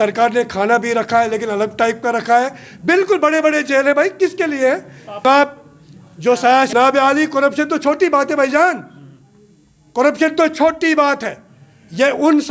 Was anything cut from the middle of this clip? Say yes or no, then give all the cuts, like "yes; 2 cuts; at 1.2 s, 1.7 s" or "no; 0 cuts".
no; 0 cuts